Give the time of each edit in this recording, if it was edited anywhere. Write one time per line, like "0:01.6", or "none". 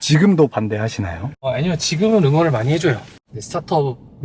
0:01.5
0:03.1